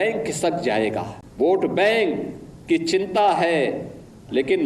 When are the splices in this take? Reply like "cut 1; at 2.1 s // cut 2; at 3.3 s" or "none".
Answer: cut 1; at 1.2 s